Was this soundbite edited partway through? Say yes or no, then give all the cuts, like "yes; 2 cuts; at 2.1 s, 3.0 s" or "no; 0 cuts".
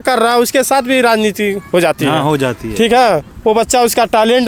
no; 0 cuts